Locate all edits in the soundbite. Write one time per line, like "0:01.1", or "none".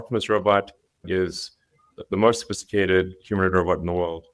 none